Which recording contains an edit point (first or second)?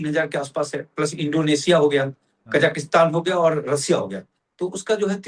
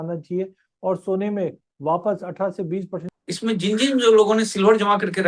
second